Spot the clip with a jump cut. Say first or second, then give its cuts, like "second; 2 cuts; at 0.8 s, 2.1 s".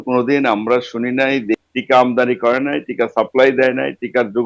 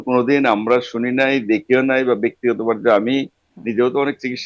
first; 1 cut; at 1.6 s